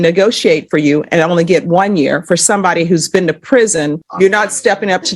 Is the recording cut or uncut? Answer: cut